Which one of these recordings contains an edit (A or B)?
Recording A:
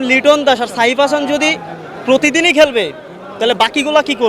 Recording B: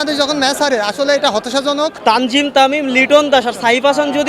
B